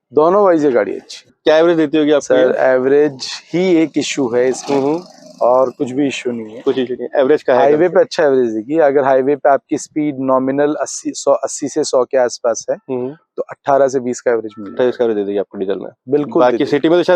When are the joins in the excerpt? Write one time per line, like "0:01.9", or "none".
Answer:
0:01.2